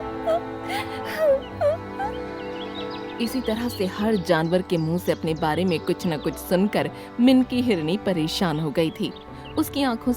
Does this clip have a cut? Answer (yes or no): no